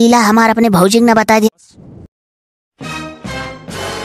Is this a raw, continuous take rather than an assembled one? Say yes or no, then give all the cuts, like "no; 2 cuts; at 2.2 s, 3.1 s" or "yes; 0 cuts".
no; 1 cut; at 1.5 s